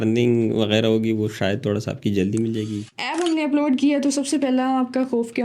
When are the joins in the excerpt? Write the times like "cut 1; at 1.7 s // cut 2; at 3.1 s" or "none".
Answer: cut 1; at 2.9 s